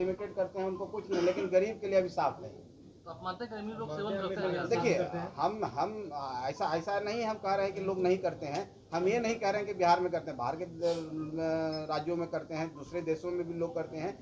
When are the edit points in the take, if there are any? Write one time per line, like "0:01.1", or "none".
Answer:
none